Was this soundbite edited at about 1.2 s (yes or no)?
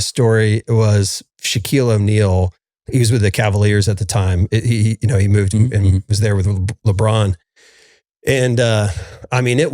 yes